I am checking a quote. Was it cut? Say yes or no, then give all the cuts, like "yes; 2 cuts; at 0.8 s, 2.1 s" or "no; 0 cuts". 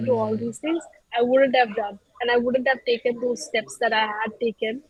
no; 0 cuts